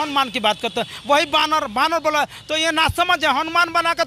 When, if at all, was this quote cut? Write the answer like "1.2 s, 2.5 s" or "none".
none